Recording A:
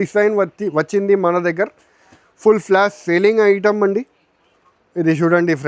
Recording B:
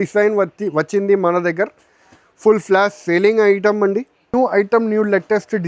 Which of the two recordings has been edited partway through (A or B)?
B